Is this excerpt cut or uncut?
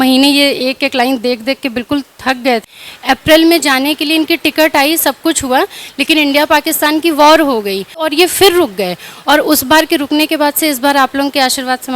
cut